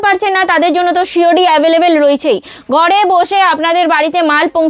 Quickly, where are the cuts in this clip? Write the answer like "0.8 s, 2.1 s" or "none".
none

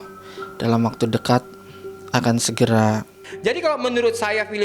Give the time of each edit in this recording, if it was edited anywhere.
3.2 s

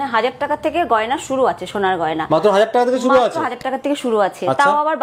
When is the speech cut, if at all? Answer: none

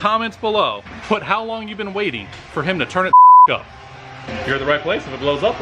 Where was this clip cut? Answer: 0.9 s, 4.2 s

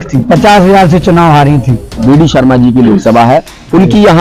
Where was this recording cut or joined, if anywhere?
2.0 s

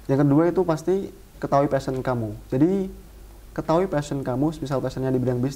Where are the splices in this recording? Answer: 1.3 s

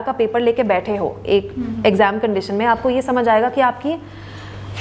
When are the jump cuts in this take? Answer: none

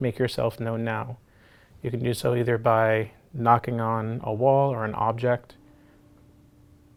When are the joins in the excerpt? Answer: none

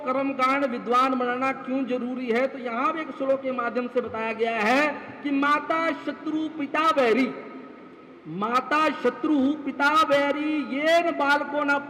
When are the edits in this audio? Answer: none

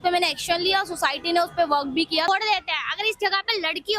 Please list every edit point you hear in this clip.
2.3 s

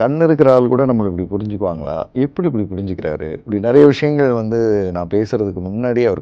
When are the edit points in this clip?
none

